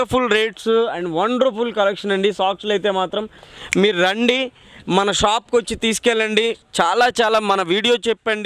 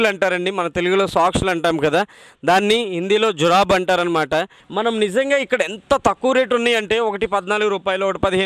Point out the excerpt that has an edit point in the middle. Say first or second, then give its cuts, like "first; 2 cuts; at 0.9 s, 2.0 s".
second; 1 cut; at 4.6 s